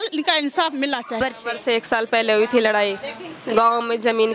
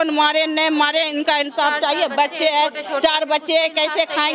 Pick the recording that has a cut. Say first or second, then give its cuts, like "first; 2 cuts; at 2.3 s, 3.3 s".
first; 1 cut; at 1.2 s